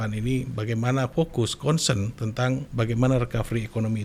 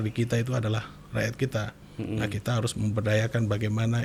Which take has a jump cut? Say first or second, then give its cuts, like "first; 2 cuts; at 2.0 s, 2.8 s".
first; 2 cuts; at 1.1 s, 2.7 s